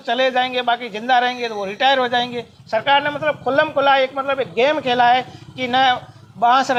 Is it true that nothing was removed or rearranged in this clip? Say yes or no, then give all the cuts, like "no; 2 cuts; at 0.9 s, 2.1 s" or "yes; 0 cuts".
yes; 0 cuts